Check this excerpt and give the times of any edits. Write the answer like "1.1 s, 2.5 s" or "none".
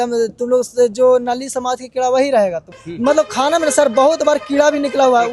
2.8 s